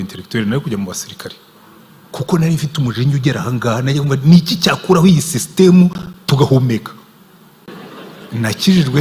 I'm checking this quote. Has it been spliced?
yes; 1 cut; at 7.7 s

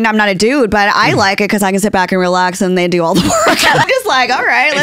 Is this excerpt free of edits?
no; 1 cut; at 3.8 s

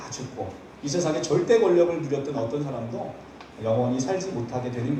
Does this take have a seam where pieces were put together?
no; 0 cuts

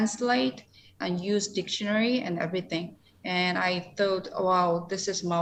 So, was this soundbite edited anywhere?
no; 0 cuts

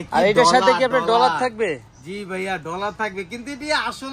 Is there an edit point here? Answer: no; 0 cuts

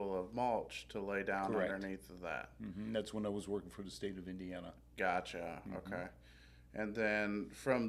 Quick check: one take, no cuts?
yes; 0 cuts

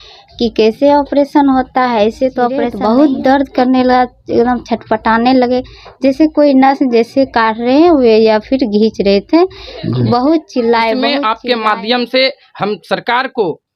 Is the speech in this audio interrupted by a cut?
yes; 2 cuts; at 2.7 s, 11.2 s

